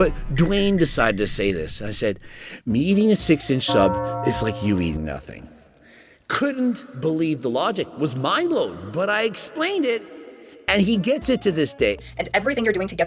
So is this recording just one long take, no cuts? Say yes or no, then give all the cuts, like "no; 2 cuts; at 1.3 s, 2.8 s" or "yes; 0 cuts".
no; 1 cut; at 12.0 s